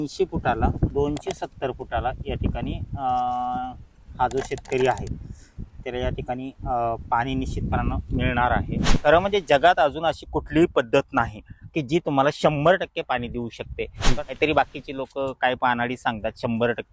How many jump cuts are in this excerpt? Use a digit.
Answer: 3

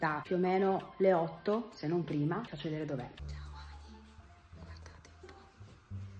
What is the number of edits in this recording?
1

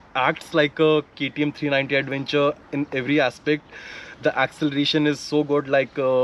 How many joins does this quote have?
0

